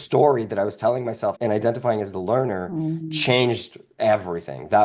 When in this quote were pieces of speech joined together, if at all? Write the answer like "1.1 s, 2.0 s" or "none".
1.4 s

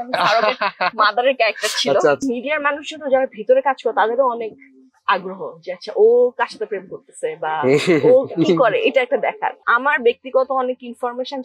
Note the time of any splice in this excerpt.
2.2 s, 9.6 s

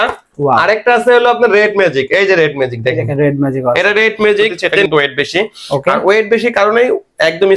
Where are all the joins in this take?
4.9 s

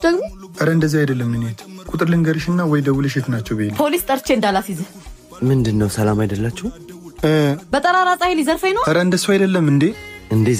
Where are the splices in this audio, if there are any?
none

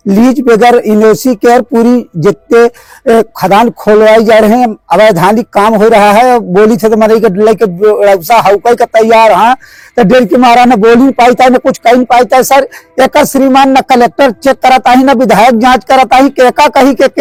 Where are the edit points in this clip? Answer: none

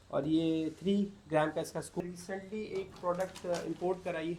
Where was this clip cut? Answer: 2.0 s

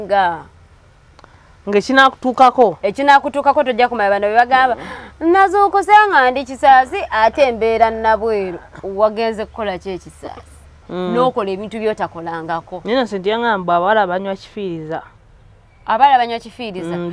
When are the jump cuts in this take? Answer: 10.8 s

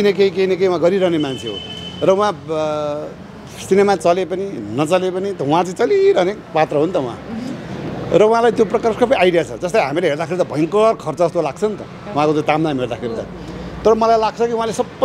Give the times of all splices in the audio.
none

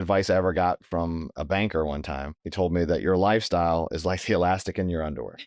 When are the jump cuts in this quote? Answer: 1.3 s, 2.4 s

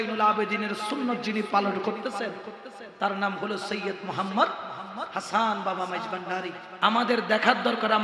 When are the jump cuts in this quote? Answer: 6.6 s

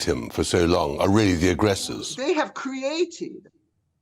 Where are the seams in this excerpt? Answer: 2.2 s

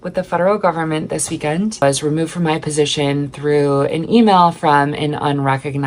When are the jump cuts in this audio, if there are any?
1.8 s

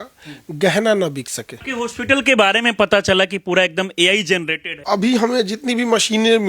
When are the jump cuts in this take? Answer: 1.6 s, 4.7 s

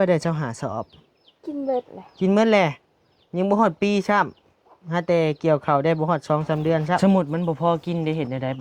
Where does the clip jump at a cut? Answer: 7.0 s

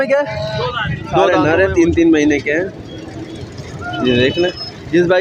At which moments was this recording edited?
1.2 s

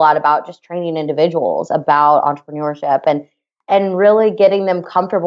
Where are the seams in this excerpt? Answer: none

